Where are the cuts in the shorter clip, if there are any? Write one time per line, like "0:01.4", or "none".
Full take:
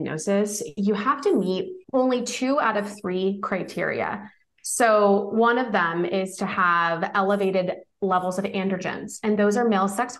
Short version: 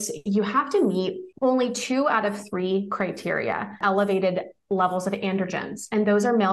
0:03.8